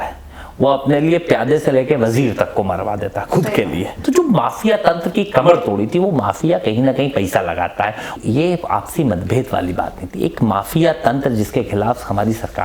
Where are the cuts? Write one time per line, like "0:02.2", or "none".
0:03.9
0:08.2